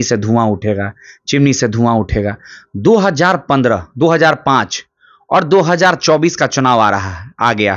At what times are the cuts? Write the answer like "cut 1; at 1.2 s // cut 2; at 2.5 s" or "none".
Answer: none